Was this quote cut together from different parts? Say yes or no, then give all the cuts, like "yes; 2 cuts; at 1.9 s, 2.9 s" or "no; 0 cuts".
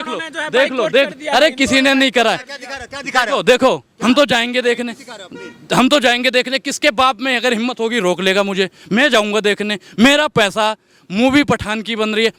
no; 0 cuts